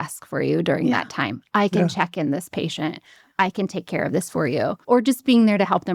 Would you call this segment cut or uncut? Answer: cut